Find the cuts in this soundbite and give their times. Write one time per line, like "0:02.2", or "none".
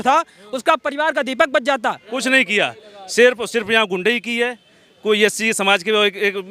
0:02.1